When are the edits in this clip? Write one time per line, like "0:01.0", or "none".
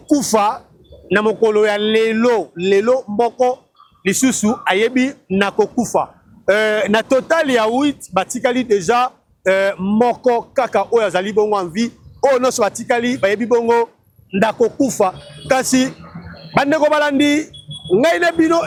none